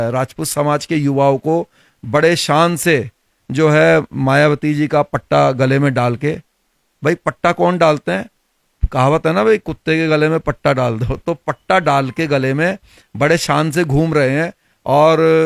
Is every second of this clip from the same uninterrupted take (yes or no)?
yes